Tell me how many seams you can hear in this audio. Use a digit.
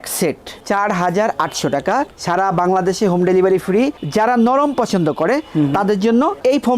1